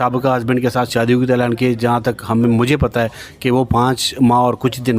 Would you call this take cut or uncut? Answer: uncut